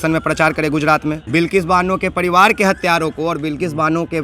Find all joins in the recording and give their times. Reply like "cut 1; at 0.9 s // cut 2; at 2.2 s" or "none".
cut 1; at 1.2 s